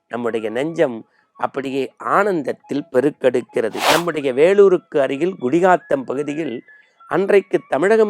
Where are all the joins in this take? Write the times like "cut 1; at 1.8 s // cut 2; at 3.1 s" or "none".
cut 1; at 3.8 s